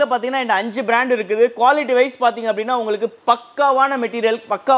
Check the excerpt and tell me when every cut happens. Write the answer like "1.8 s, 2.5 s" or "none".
none